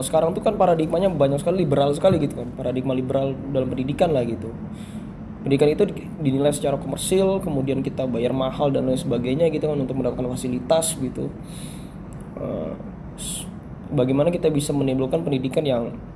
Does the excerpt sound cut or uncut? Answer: uncut